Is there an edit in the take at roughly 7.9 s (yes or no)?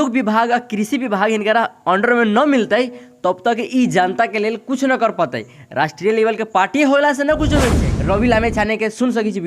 yes